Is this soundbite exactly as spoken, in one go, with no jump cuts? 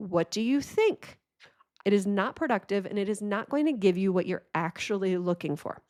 yes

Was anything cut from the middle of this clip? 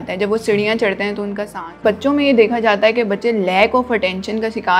yes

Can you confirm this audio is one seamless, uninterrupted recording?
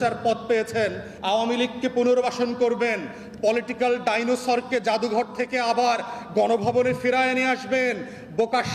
no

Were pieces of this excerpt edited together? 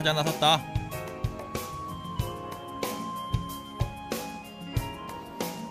yes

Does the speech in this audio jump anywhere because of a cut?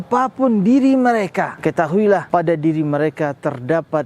yes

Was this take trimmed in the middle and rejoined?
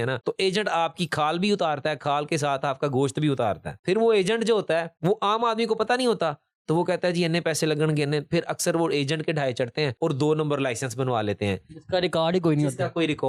no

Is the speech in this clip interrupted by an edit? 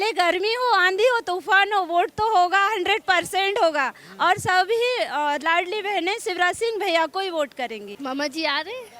yes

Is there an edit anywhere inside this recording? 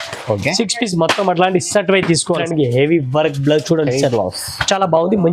yes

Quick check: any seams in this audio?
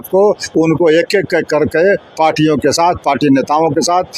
no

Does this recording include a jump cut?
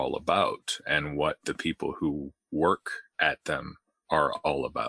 no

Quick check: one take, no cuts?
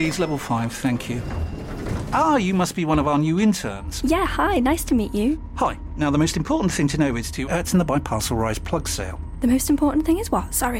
yes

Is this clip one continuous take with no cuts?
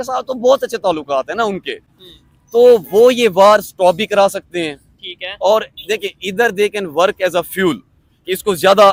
yes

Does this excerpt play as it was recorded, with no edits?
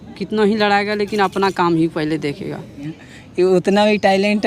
no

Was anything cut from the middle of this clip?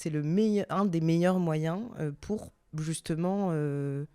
no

